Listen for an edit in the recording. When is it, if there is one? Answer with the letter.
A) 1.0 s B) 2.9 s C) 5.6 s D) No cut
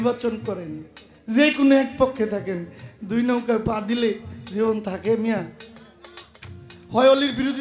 D